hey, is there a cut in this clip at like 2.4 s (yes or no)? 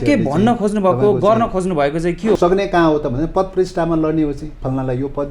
yes